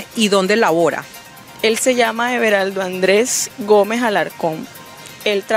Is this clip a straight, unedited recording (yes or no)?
yes